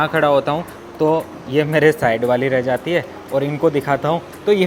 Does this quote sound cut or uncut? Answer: uncut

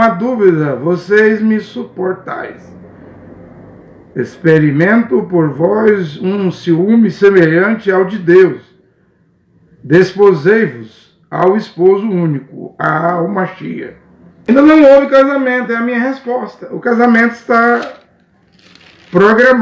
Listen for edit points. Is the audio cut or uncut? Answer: cut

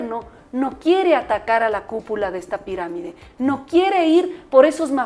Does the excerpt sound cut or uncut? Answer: uncut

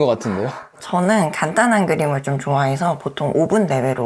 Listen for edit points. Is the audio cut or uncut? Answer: uncut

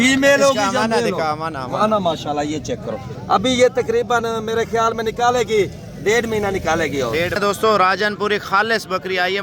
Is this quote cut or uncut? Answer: cut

